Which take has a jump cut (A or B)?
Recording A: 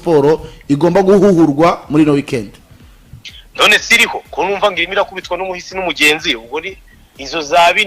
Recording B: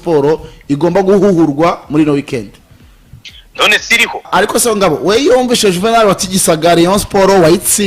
B